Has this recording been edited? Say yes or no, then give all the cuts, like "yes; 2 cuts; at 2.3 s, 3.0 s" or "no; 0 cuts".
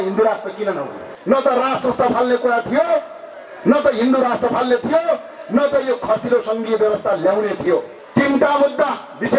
yes; 1 cut; at 8.0 s